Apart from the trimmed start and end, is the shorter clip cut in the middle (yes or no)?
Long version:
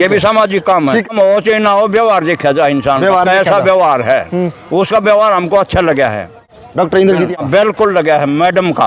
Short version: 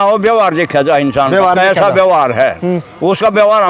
no